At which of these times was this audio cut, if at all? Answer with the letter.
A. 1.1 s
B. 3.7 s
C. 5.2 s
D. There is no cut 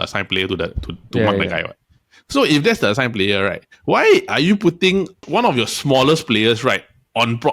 C